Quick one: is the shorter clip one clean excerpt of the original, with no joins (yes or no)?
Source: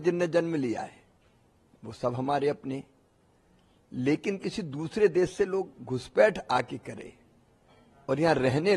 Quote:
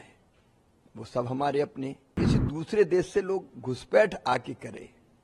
no